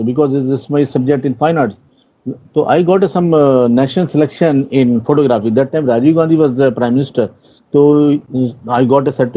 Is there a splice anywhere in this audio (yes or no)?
no